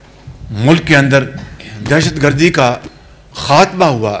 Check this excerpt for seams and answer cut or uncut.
uncut